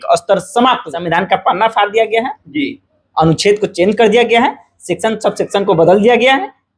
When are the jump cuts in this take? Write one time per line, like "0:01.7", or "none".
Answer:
0:00.9